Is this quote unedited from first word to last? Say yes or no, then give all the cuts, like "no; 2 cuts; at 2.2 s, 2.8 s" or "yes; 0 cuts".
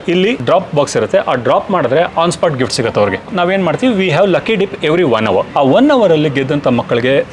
no; 1 cut; at 3.3 s